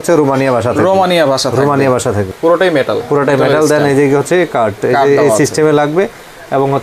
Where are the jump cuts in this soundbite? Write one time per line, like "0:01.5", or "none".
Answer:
0:02.3